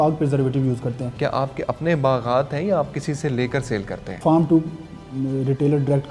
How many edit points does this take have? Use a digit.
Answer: 2